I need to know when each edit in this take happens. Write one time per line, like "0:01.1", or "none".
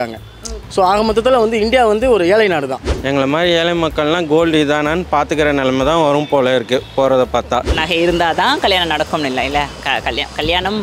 0:02.8
0:07.8